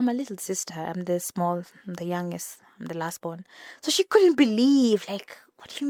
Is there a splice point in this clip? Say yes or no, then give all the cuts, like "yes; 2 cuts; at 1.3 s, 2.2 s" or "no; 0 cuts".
no; 0 cuts